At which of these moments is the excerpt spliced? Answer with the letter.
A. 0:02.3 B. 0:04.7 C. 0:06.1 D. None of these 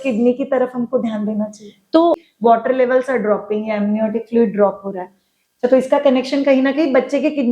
A